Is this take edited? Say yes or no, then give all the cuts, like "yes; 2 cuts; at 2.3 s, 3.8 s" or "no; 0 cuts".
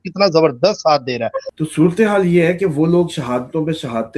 yes; 1 cut; at 1.4 s